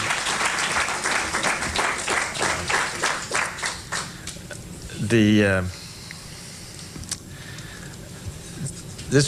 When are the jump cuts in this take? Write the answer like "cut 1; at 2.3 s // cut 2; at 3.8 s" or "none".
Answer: none